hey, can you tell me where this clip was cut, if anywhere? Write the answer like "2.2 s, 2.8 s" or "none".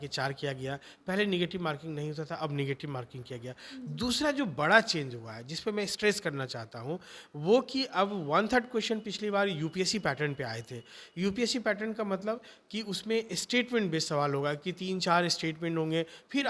none